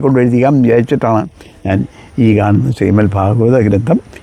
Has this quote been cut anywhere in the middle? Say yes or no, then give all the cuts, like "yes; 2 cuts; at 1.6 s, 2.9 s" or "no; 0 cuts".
no; 0 cuts